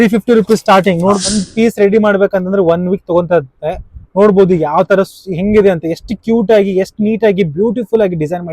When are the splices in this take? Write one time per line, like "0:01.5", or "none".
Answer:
0:01.3